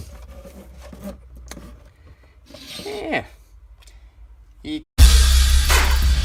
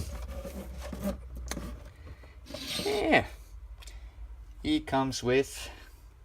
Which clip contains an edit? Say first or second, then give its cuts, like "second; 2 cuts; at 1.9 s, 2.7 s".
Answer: second; 1 cut; at 4.9 s